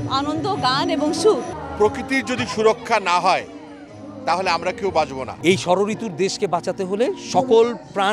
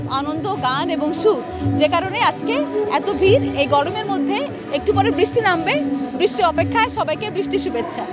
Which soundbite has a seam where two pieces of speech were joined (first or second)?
first